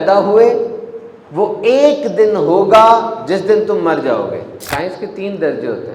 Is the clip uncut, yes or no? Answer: no